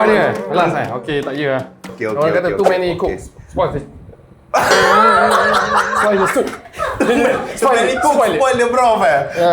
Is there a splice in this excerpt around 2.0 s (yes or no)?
yes